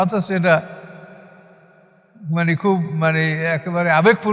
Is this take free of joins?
yes; 0 cuts

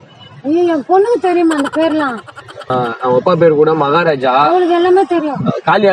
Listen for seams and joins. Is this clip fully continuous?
yes; 0 cuts

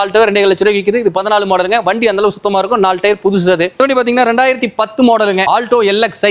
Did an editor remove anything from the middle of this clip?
no; 0 cuts

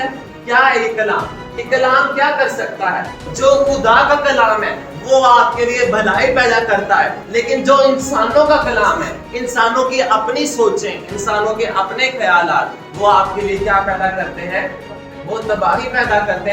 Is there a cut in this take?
yes; 1 cut; at 3.2 s

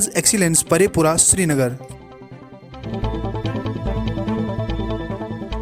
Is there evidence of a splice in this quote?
yes; 1 cut; at 2.9 s

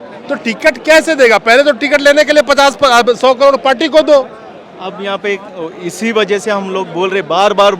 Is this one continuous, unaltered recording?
yes; 0 cuts

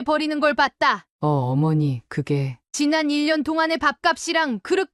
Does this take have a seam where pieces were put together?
yes; 1 cut; at 1.1 s

